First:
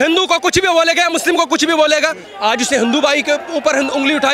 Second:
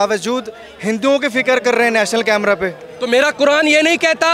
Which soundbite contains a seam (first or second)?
first